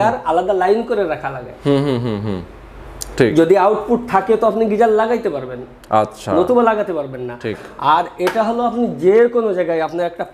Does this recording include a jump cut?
no; 0 cuts

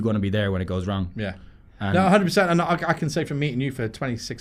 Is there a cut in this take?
no; 0 cuts

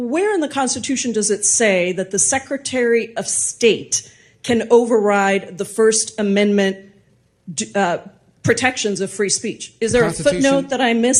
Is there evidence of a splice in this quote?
no; 0 cuts

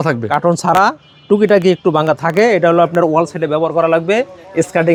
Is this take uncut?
yes; 0 cuts

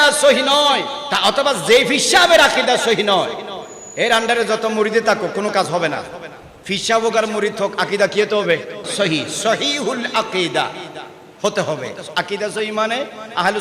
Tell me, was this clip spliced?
yes; 2 cuts; at 1.0 s, 8.8 s

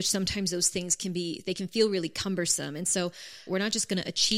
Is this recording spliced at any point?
yes; 1 cut; at 3.4 s

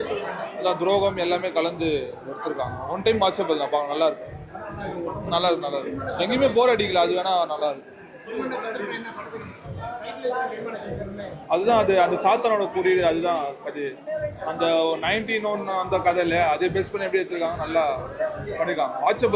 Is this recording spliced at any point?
no; 0 cuts

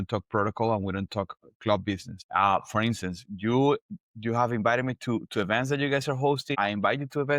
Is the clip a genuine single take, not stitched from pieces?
no; 2 cuts; at 2.1 s, 6.5 s

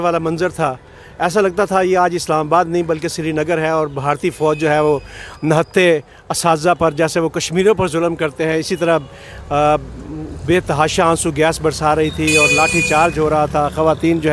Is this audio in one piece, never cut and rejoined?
yes; 0 cuts

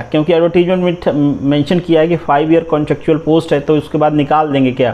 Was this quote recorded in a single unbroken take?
yes; 0 cuts

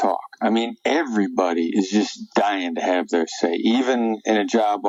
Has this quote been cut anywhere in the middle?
no; 0 cuts

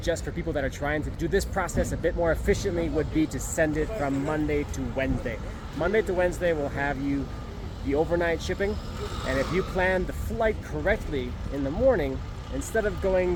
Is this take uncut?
yes; 0 cuts

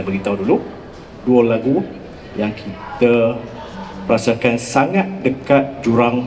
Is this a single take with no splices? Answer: yes; 0 cuts

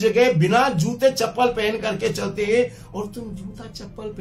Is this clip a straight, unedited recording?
yes; 0 cuts

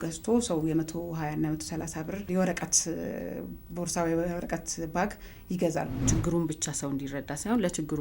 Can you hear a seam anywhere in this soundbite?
yes; 2 cuts; at 2.3 s, 6.1 s

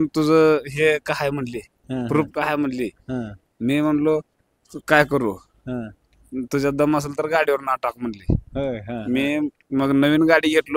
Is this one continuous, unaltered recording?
yes; 0 cuts

